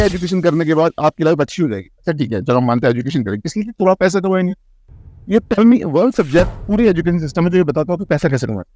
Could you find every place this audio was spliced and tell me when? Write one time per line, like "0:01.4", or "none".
none